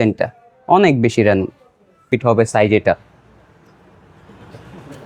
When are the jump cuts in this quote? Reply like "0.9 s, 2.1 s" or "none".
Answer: 2.0 s